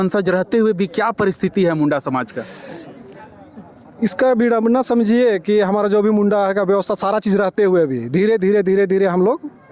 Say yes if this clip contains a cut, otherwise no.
no